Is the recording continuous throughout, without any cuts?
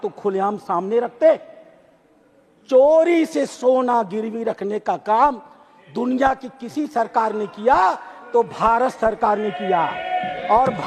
yes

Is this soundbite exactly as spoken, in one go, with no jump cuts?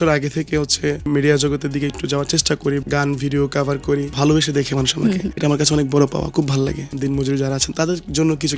no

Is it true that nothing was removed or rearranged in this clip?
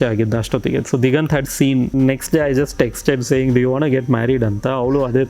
no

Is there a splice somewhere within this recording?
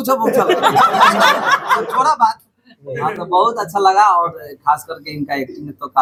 no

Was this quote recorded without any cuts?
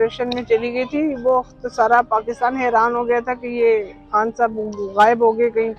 yes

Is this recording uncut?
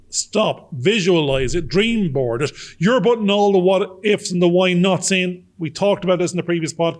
yes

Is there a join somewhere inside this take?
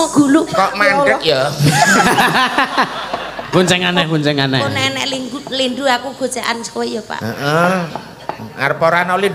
yes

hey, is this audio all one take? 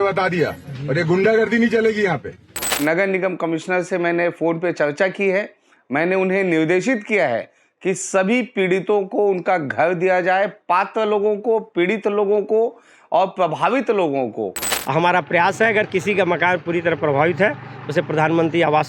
no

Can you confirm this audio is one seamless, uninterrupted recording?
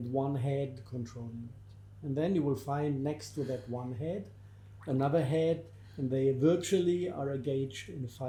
yes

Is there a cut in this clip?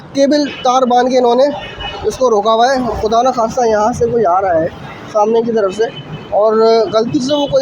no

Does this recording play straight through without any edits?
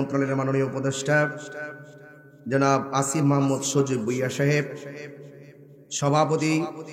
yes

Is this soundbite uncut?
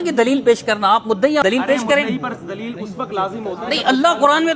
no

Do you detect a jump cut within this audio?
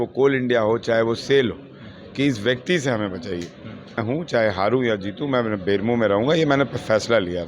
yes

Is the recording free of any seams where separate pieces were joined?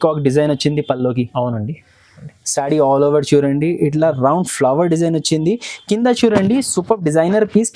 yes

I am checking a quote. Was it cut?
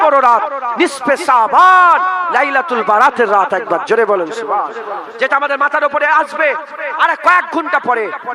no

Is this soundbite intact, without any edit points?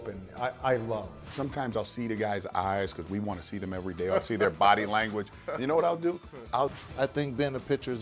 no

